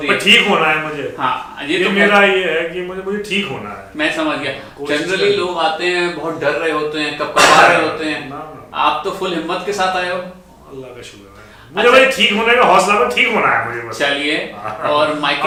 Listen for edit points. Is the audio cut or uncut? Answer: uncut